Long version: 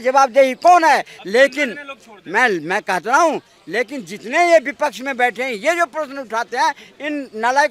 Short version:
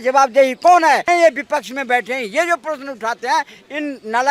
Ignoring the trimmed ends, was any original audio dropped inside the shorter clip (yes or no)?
yes